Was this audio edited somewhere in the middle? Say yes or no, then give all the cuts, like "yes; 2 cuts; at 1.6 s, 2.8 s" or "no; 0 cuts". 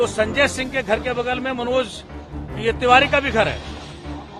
no; 0 cuts